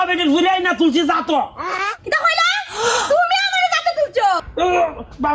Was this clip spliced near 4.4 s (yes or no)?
yes